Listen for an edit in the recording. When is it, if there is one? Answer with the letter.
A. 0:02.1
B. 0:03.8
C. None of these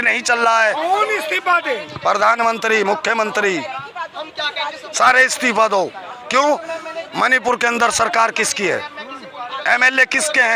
C